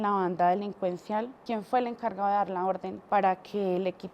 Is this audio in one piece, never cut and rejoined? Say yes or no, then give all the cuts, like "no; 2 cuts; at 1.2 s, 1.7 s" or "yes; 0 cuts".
no; 2 cuts; at 1.4 s, 2.9 s